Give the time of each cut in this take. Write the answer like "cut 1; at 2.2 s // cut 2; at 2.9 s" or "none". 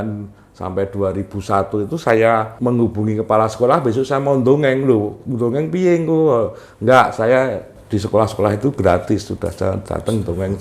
cut 1; at 2.5 s